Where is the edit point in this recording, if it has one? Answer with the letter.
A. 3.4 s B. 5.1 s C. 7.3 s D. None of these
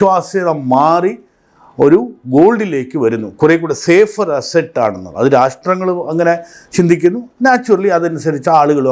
D